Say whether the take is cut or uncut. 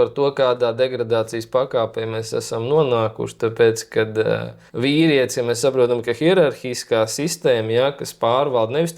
uncut